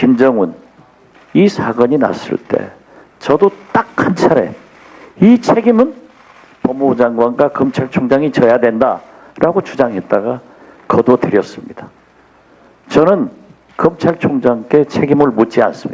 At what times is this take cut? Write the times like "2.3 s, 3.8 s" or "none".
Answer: 10.0 s